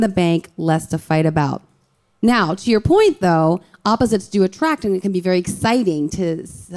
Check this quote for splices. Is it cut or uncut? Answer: uncut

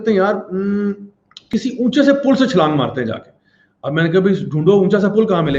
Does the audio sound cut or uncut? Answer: uncut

